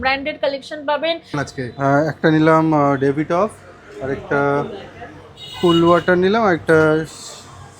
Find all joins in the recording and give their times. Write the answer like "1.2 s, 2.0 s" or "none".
1.5 s